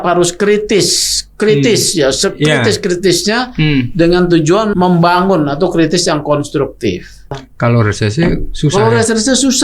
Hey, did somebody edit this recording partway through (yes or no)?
yes